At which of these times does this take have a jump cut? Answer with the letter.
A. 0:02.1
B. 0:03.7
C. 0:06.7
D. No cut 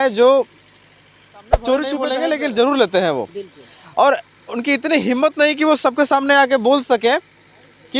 A